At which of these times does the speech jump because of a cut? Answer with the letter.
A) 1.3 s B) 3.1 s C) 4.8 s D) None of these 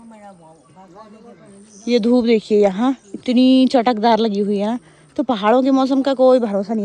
D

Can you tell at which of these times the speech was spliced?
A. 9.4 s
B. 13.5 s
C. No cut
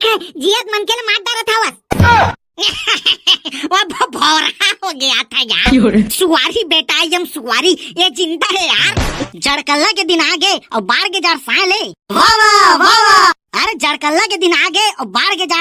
A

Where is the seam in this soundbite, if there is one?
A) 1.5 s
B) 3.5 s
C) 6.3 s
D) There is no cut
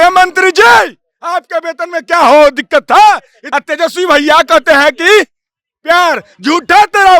B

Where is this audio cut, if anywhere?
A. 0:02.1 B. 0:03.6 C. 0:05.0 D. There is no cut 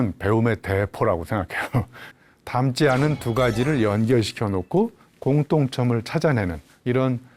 A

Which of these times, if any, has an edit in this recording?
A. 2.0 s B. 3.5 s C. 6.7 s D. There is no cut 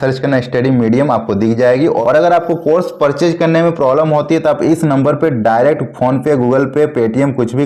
A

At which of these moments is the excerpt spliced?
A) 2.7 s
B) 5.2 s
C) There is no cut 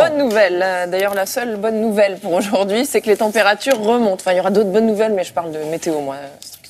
C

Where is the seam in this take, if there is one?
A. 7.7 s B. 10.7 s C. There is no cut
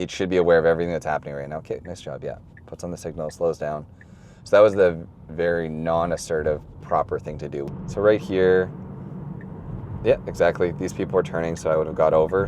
A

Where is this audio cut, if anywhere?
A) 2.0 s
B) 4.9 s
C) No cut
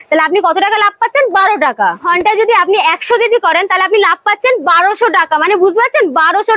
A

